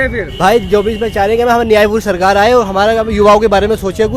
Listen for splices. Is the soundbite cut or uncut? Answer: uncut